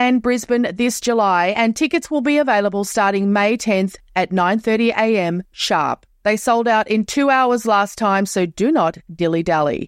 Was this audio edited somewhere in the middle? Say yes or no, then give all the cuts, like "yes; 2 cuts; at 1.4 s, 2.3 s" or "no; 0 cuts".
no; 0 cuts